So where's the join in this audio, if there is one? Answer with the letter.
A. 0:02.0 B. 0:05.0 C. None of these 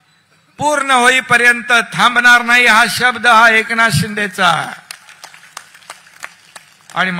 C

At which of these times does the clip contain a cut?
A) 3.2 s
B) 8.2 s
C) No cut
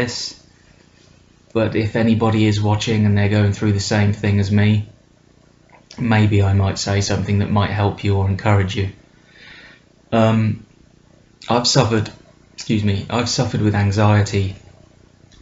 A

